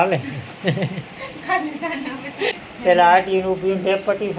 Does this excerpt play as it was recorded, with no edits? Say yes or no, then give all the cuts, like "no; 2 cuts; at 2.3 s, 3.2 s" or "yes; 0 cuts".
yes; 0 cuts